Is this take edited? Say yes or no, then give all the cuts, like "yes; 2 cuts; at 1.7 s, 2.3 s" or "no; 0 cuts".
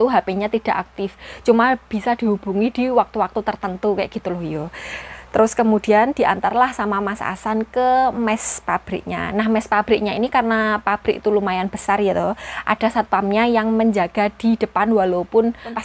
no; 0 cuts